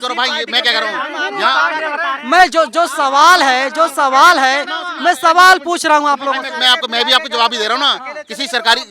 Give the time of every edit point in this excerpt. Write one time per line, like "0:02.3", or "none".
none